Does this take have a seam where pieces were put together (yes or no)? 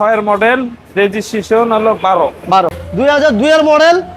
yes